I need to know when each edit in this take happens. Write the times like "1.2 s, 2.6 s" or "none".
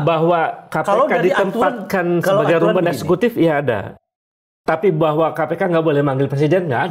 none